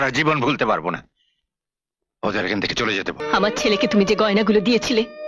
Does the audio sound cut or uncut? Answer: cut